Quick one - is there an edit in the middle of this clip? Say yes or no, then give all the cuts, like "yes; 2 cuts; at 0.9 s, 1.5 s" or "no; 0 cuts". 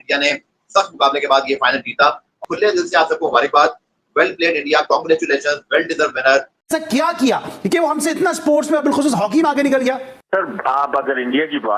yes; 2 cuts; at 2.4 s, 6.6 s